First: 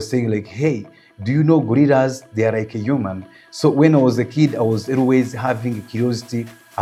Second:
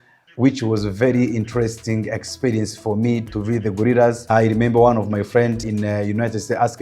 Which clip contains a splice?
second; 3 cuts; at 3.3 s, 4.2 s, 5.6 s

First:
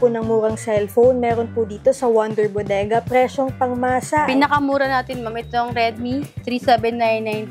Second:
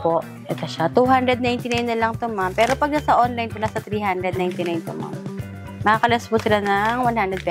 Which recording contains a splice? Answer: first; 1 cut; at 4.3 s

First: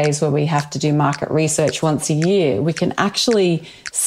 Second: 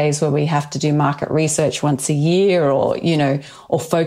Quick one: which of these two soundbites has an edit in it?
first; 1 cut; at 1.8 s

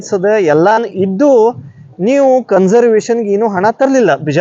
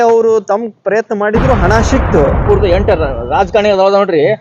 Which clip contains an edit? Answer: second; 1 cut; at 2.4 s

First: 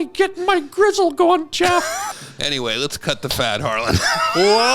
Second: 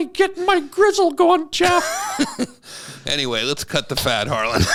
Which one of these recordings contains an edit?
first; 1 cut; at 2.1 s

